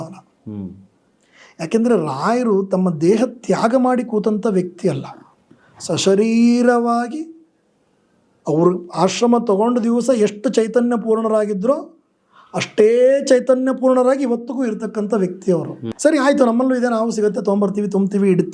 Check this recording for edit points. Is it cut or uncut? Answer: cut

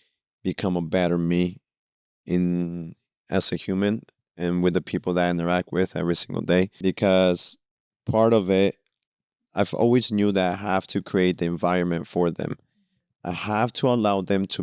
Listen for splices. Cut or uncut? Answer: cut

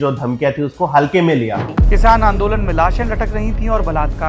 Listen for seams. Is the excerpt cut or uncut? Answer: cut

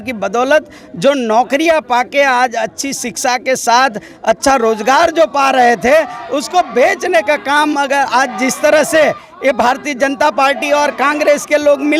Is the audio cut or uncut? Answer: uncut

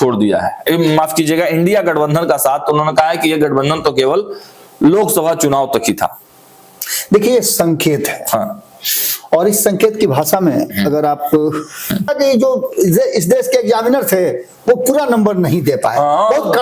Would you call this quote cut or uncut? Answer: cut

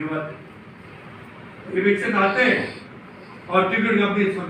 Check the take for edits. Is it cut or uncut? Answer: uncut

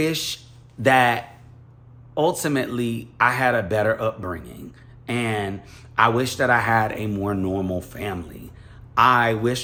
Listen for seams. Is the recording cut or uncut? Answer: uncut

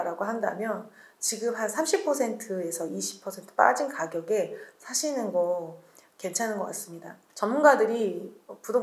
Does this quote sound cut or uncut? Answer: uncut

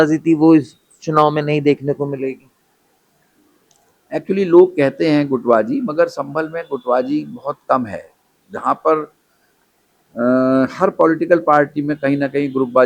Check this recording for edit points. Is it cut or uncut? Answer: uncut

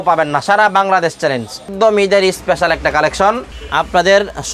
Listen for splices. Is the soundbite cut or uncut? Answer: cut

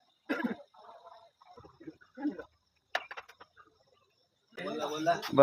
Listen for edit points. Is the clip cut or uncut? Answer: cut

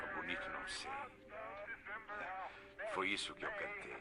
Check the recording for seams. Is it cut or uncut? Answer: cut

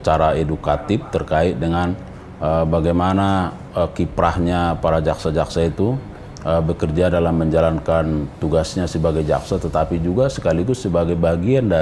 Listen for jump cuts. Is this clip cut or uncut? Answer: uncut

